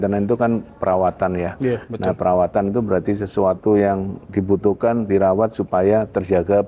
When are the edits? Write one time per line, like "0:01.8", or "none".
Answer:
none